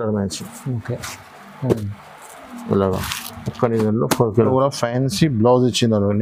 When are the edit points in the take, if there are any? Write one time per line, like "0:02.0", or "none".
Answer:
0:04.5